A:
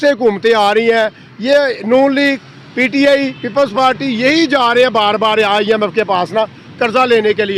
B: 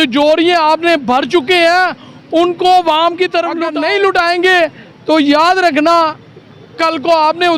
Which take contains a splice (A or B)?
B